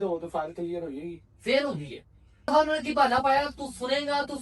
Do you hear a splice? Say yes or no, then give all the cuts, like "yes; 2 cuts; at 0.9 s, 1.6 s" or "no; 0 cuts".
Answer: yes; 1 cut; at 2.5 s